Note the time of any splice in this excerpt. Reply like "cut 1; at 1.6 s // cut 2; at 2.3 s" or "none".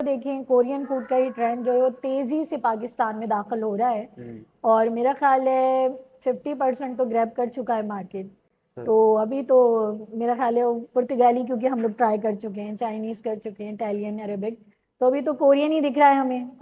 none